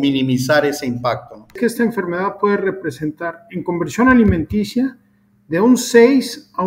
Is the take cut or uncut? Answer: cut